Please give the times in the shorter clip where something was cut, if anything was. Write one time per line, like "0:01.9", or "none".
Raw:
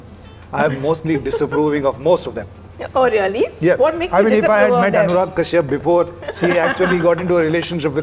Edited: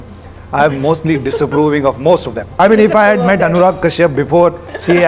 0:02.5